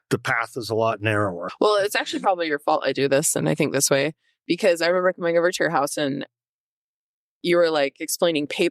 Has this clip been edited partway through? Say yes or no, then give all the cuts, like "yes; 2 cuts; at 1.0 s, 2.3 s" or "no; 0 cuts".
yes; 1 cut; at 1.4 s